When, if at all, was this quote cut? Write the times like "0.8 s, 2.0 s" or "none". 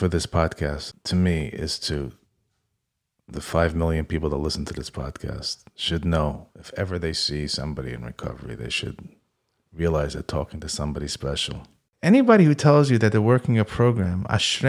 0.9 s, 11.8 s